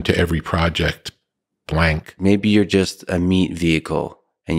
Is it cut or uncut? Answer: cut